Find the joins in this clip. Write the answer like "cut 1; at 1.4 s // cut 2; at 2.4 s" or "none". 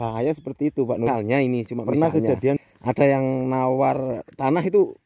cut 1; at 2.6 s

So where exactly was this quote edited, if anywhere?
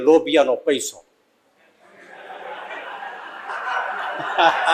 none

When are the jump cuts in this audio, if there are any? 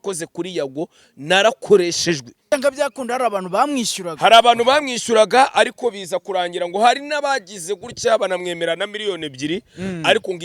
cut 1; at 2.3 s

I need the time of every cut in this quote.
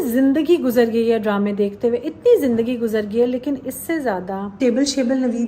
cut 1; at 4.6 s

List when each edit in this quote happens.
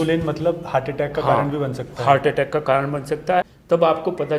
cut 1; at 3.5 s

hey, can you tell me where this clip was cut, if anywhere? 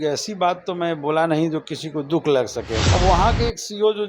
cut 1; at 2.8 s

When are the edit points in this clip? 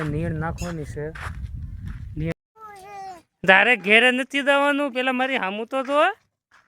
cut 1; at 2.3 s

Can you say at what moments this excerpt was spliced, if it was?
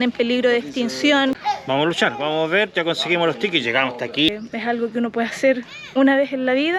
cut 1; at 1.4 s // cut 2; at 4.3 s

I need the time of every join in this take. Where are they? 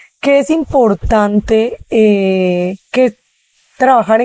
none

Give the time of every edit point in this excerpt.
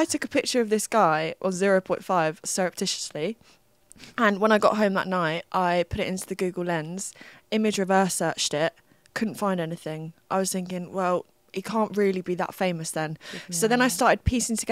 none

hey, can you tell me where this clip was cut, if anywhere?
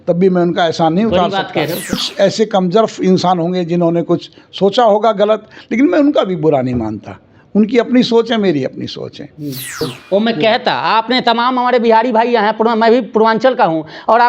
cut 1; at 2.1 s // cut 2; at 9.8 s

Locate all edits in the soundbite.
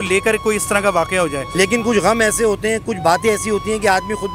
cut 1; at 1.4 s

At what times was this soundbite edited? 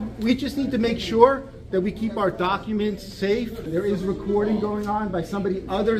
cut 1; at 3.7 s

